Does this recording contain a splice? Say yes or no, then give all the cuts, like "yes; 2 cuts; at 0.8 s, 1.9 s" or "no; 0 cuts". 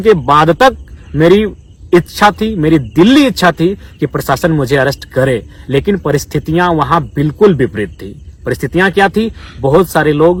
no; 0 cuts